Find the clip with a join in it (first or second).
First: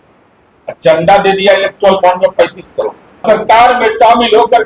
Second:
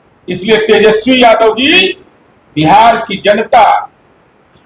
first